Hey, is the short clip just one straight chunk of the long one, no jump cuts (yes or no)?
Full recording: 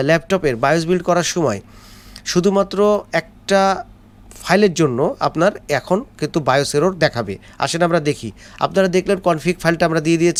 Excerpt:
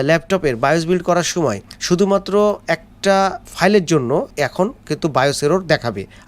no